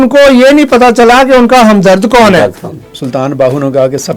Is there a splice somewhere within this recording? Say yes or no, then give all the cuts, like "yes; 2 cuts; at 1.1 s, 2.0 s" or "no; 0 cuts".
yes; 1 cut; at 2.9 s